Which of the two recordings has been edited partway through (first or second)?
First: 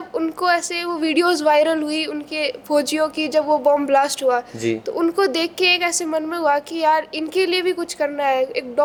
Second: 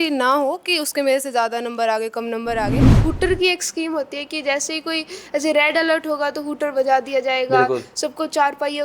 second